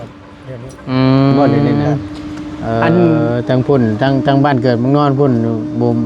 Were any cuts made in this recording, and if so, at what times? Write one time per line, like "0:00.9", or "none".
0:03.2